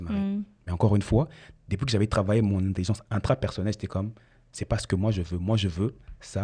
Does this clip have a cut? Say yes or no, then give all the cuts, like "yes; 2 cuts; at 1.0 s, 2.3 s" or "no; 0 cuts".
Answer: no; 0 cuts